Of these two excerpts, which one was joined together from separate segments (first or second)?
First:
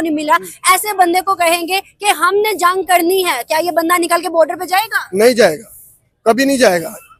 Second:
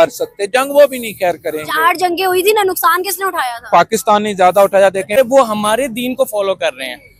second